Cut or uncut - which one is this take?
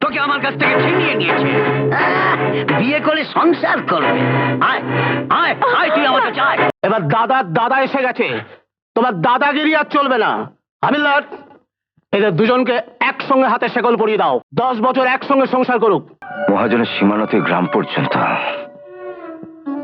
cut